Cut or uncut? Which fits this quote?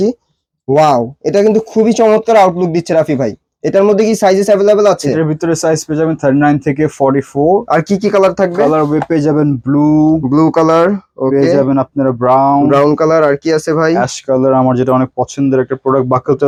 uncut